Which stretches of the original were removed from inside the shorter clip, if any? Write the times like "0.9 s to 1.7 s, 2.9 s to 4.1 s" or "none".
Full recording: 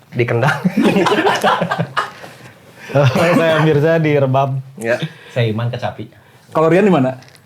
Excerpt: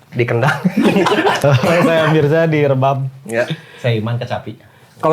1.4 s to 2.9 s